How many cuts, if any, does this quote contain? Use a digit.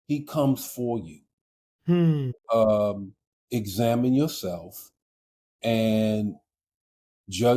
1